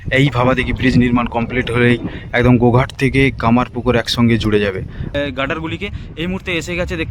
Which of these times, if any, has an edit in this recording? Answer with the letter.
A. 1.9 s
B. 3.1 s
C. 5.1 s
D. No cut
C